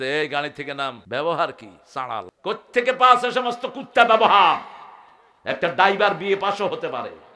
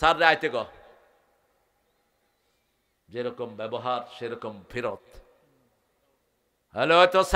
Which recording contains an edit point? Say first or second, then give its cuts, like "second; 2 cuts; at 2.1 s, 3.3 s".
first; 2 cuts; at 1.0 s, 2.3 s